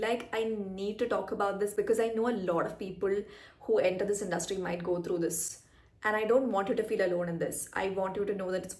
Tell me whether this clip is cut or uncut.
uncut